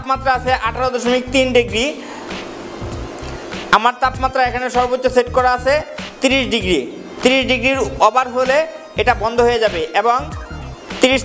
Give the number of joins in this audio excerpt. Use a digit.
0